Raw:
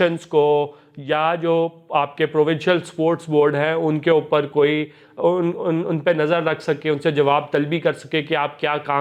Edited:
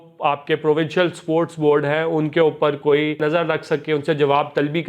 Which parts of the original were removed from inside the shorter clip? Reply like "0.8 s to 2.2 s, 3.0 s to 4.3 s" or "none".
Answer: 4.9 s to 6.2 s